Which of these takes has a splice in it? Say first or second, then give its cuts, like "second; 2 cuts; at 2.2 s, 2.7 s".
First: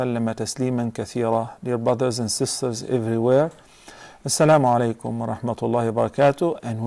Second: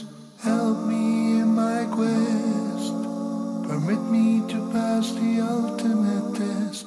first; 1 cut; at 3.9 s